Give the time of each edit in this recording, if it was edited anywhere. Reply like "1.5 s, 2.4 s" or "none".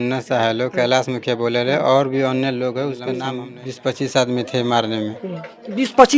3.3 s